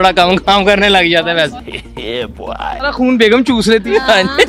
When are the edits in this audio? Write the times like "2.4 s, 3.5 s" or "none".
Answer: none

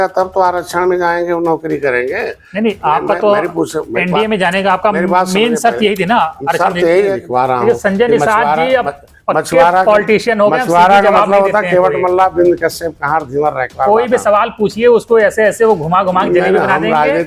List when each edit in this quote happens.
7.2 s

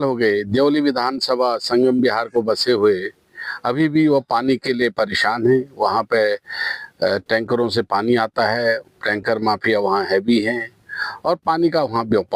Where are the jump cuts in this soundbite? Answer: none

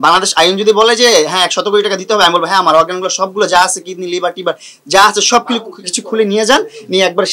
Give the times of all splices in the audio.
none

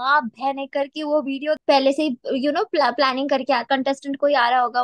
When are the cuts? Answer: 1.6 s, 3.6 s

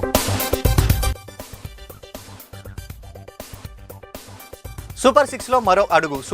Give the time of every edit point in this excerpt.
1.2 s, 4.9 s

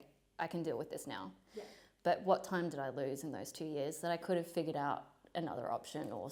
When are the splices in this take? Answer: none

